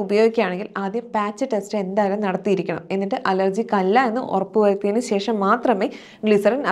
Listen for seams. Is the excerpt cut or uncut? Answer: uncut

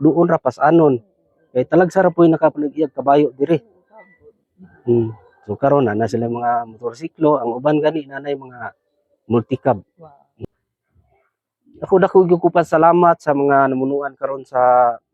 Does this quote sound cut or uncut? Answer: cut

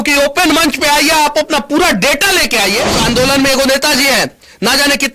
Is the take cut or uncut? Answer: cut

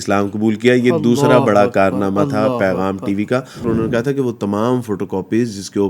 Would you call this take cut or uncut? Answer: cut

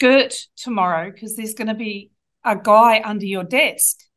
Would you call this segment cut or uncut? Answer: uncut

